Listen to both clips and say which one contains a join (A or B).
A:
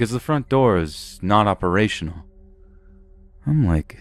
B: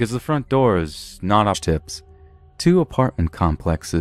A